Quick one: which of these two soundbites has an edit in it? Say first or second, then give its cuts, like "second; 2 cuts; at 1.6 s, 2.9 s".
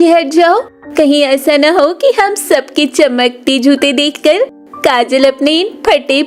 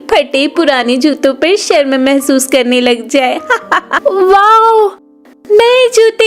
second; 1 cut; at 3.9 s